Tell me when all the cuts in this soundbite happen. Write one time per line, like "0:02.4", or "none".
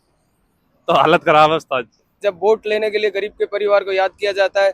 0:02.2